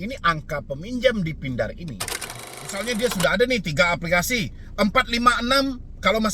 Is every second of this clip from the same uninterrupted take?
no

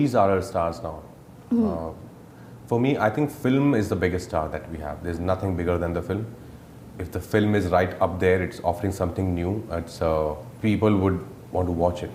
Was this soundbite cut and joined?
no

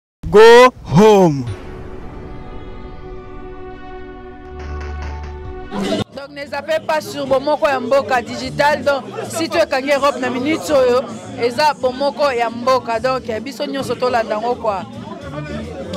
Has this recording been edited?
yes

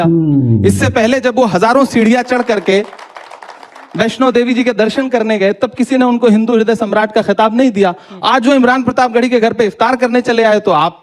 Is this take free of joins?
yes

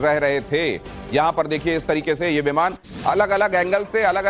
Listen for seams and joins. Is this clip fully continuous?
no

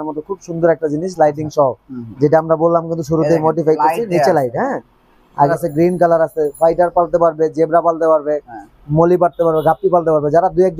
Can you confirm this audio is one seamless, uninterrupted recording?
no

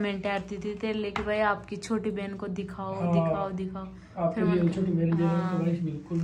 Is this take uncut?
yes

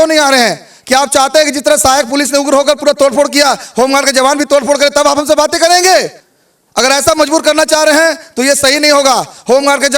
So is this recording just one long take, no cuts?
yes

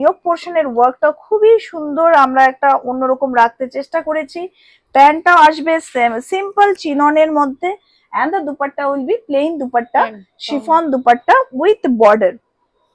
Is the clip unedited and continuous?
yes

